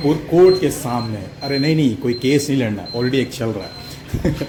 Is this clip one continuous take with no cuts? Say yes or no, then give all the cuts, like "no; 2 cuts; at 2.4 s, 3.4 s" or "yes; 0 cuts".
yes; 0 cuts